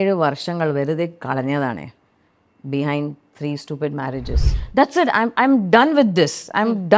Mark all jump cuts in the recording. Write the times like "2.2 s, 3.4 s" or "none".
4.6 s